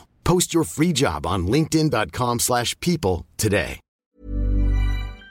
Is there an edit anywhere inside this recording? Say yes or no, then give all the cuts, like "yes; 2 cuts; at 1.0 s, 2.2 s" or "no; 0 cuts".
yes; 1 cut; at 4.1 s